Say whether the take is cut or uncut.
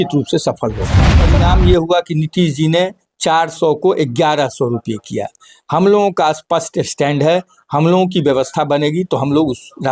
cut